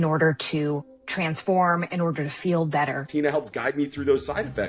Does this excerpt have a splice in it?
yes; 2 cuts; at 1.0 s, 3.1 s

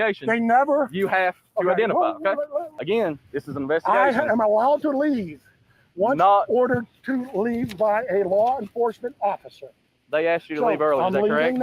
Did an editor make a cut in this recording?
yes; 1 cut; at 2.7 s

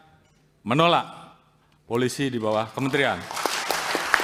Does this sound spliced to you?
no; 0 cuts

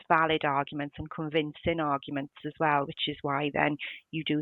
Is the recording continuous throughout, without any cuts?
yes; 0 cuts

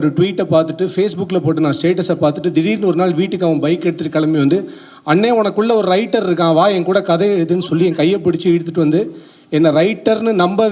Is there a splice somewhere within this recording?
no; 0 cuts

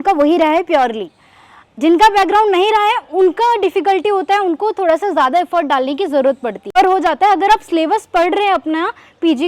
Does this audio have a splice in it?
yes; 1 cut; at 6.7 s

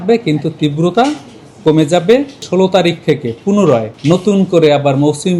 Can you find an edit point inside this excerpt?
yes; 2 cuts; at 2.4 s, 3.9 s

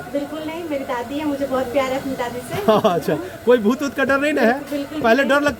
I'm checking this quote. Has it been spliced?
no; 0 cuts

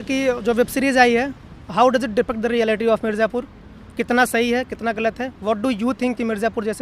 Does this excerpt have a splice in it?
no; 0 cuts

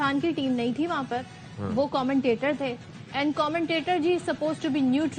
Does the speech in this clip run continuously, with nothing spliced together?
yes; 0 cuts

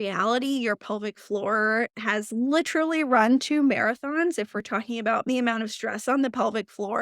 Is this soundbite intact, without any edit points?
no; 1 cut; at 5.3 s

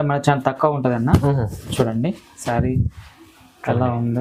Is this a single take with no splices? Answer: yes; 0 cuts

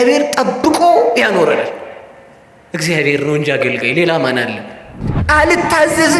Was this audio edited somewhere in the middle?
yes; 1 cut; at 5.1 s

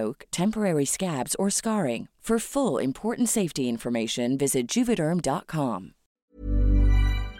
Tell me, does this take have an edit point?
yes; 1 cut; at 6.1 s

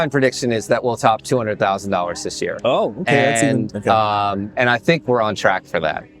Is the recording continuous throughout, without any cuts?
yes; 0 cuts

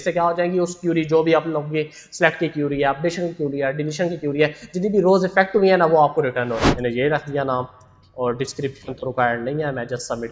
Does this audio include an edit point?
yes; 1 cut; at 6.6 s

